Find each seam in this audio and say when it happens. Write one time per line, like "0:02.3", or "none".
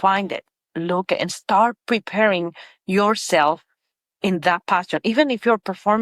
none

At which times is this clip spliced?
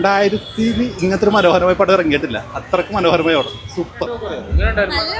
0:04.0

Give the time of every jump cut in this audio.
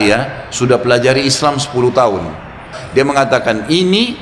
0:02.7

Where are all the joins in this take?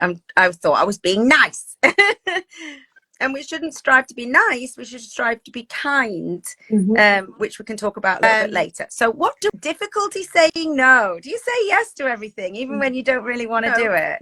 0:09.5

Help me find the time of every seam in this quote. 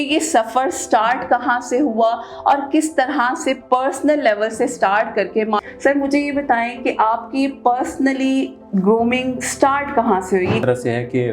0:05.7
0:10.6

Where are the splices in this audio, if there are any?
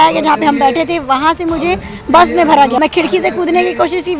0:02.8

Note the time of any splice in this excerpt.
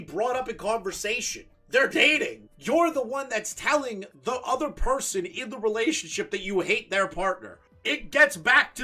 none

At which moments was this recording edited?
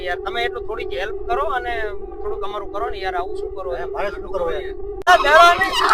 0:05.0

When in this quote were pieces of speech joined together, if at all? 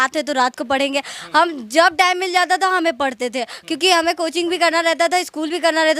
none

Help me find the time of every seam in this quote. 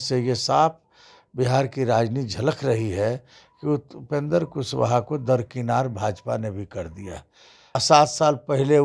0:07.8

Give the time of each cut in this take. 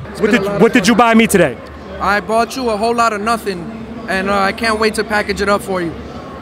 none

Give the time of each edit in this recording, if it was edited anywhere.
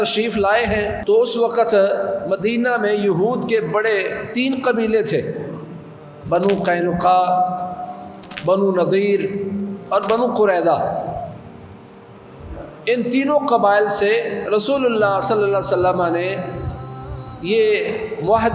0:01.0

